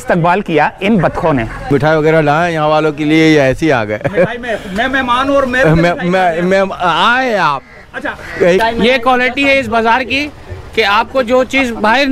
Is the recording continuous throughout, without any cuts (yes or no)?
no